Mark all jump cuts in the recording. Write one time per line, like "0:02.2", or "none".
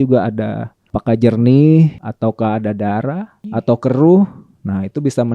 0:00.9
0:02.0
0:03.3